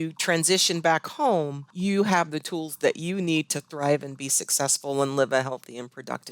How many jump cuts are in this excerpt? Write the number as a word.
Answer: one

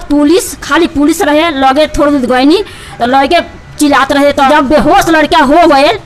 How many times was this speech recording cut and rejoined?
one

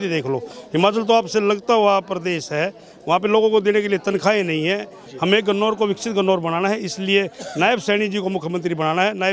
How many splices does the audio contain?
one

